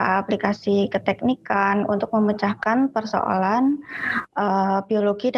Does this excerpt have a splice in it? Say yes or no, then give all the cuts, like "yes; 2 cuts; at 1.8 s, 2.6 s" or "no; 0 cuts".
no; 0 cuts